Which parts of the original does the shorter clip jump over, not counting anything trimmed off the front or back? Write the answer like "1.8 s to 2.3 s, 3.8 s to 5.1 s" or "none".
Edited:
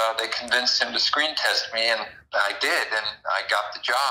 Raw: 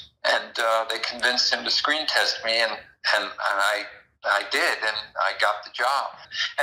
2.9 s to 4.1 s